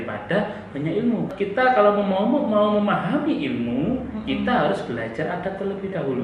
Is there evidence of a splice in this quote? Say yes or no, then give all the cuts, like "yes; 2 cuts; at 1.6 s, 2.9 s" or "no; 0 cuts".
yes; 1 cut; at 1.3 s